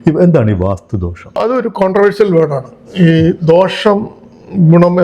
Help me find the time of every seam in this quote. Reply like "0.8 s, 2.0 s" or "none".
1.4 s